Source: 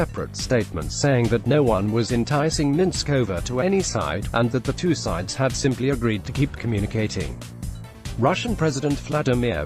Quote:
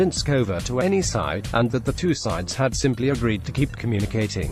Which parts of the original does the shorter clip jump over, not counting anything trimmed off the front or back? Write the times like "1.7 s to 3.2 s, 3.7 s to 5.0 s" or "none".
none